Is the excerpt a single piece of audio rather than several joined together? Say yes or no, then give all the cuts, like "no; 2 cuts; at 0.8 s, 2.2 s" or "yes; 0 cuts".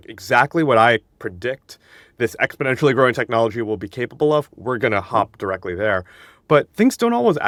yes; 0 cuts